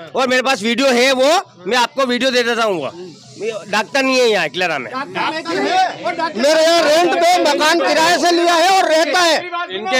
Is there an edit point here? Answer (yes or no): no